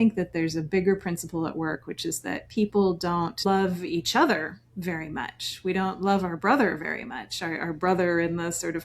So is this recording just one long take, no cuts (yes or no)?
no